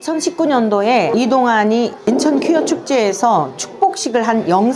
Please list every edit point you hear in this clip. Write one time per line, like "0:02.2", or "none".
0:01.1